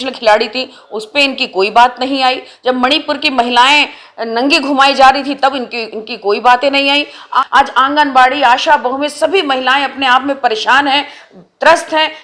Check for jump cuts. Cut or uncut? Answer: cut